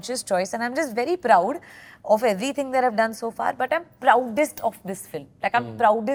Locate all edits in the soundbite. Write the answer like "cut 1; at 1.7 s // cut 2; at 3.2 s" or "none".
none

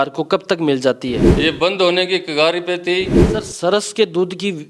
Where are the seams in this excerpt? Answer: cut 1; at 1.3 s // cut 2; at 3.2 s

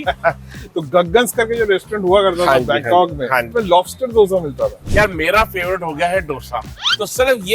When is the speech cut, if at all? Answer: cut 1; at 3.5 s // cut 2; at 4.8 s

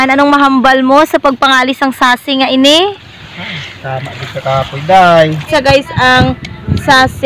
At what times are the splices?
cut 1; at 5.5 s

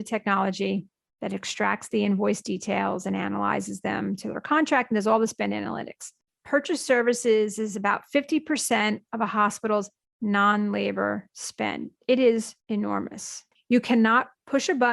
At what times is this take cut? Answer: cut 1; at 13.0 s

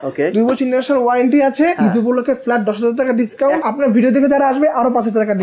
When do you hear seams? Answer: cut 1; at 1.8 s // cut 2; at 3.6 s

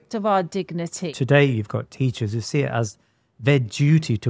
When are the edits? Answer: cut 1; at 1.1 s

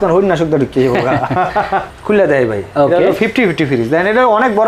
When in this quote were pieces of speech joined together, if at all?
cut 1; at 1.9 s

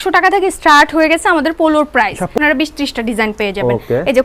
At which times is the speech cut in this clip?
cut 1; at 2.3 s

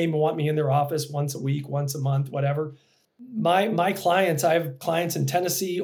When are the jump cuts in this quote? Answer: none

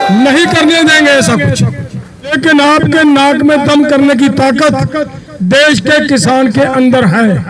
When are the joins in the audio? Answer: cut 1; at 2.3 s

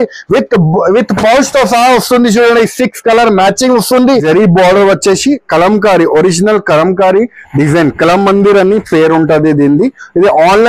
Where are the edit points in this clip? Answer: cut 1; at 4.2 s

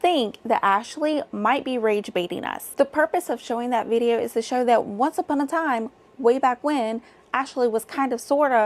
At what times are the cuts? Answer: cut 1; at 2.6 s

